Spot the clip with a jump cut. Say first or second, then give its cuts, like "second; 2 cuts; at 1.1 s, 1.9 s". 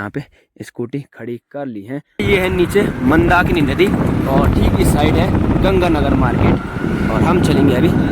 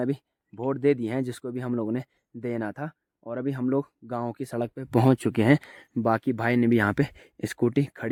first; 1 cut; at 2.2 s